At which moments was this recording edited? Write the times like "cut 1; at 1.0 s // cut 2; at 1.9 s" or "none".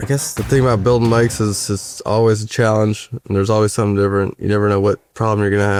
none